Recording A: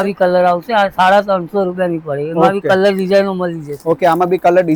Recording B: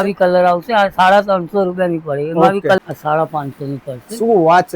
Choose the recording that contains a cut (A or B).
B